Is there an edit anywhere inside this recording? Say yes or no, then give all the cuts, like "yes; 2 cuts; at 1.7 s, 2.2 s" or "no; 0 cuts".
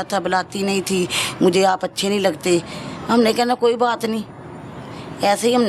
no; 0 cuts